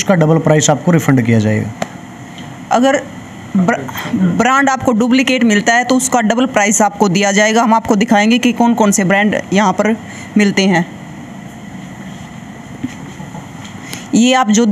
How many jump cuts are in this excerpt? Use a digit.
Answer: 0